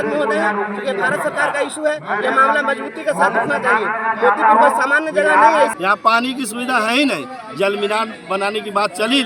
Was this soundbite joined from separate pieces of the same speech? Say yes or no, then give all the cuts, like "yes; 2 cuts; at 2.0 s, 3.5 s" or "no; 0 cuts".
yes; 1 cut; at 5.9 s